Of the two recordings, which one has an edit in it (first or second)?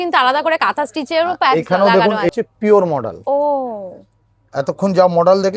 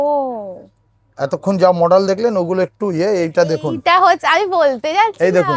first